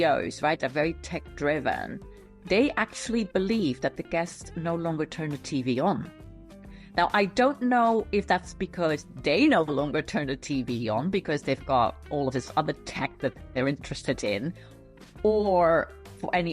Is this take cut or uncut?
uncut